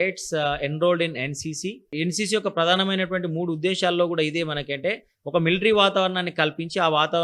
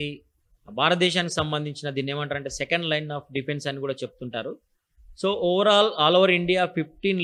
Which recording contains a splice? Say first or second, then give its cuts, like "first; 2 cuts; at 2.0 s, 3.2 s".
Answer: first; 1 cut; at 1.9 s